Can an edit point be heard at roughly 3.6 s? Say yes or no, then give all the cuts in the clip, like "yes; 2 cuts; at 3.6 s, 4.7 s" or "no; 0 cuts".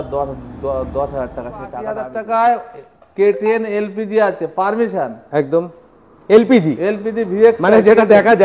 no; 1 cut; at 1.9 s